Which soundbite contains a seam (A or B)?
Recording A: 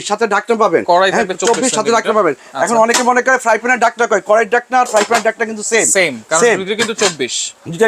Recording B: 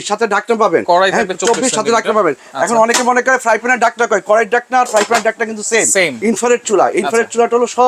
B